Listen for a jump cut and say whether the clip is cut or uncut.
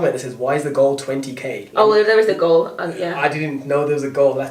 uncut